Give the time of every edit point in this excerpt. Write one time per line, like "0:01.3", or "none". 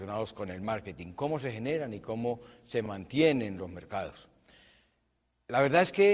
none